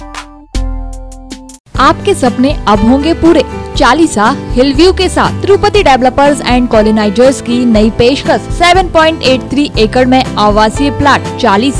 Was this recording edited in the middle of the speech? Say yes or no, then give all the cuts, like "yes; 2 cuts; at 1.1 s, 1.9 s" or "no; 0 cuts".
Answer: no; 0 cuts